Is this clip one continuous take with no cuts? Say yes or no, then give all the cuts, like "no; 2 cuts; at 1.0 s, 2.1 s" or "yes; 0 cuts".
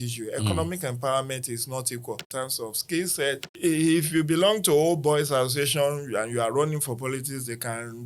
no; 2 cuts; at 2.3 s, 3.5 s